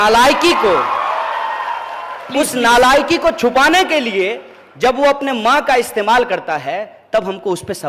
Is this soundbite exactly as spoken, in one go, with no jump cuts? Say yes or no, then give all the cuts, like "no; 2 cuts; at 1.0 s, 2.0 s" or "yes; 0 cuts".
yes; 0 cuts